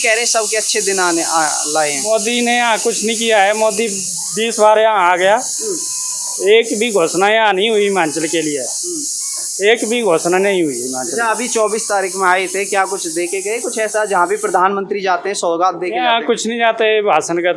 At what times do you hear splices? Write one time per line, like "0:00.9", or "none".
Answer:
none